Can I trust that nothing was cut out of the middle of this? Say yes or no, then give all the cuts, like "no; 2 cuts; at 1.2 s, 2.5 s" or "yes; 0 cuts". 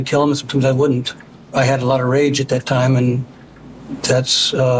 yes; 0 cuts